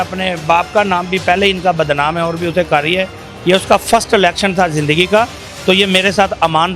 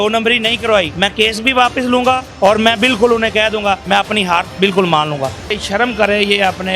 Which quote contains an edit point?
second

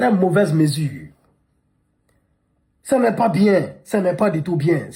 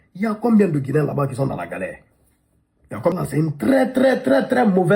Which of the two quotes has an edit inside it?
second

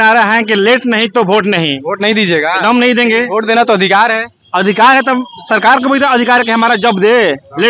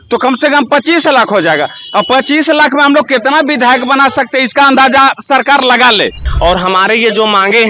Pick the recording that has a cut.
second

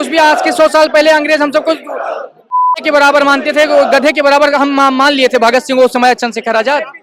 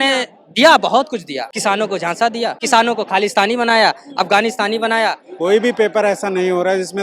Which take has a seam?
second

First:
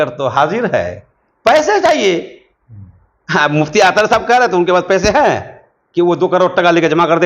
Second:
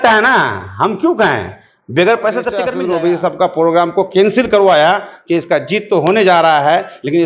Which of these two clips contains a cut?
second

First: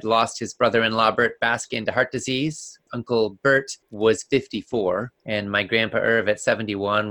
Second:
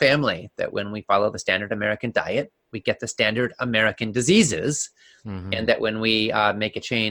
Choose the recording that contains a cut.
first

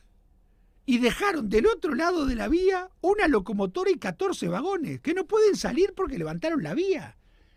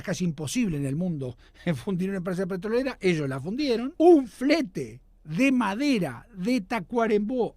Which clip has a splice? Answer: second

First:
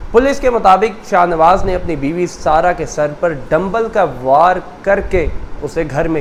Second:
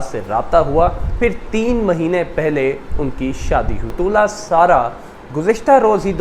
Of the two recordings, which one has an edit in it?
second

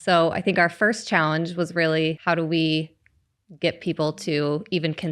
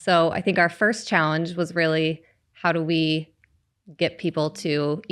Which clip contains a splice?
first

